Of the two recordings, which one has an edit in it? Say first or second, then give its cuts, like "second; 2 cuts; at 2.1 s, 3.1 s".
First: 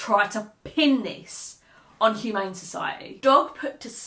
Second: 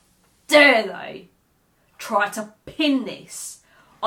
first; 1 cut; at 3.1 s